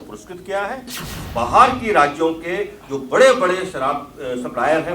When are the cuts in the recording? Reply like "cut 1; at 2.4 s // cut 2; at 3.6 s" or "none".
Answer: cut 1; at 1.0 s

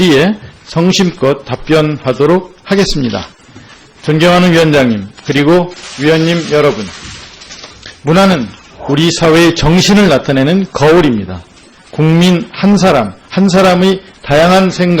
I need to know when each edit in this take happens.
cut 1; at 14.0 s

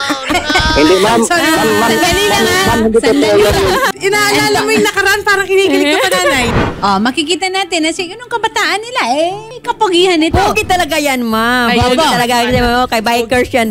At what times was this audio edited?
cut 1; at 3.9 s // cut 2; at 6.6 s // cut 3; at 9.5 s

